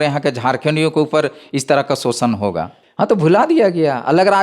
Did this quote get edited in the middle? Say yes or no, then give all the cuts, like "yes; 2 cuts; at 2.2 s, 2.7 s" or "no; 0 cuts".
yes; 1 cut; at 2.8 s